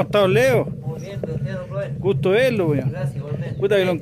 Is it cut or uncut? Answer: uncut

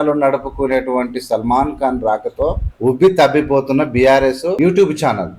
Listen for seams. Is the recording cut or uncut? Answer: cut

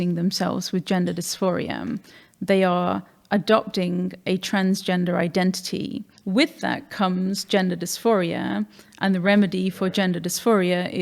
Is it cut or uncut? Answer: cut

